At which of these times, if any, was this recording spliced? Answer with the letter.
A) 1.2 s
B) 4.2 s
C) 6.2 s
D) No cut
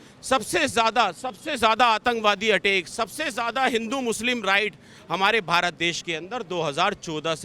D